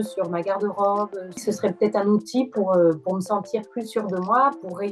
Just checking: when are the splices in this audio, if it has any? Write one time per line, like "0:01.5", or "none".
0:01.4